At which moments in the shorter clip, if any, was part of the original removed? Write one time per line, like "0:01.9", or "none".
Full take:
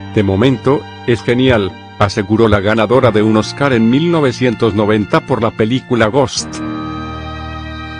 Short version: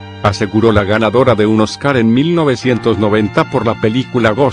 none